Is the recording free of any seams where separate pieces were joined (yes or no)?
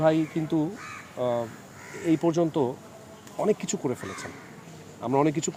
yes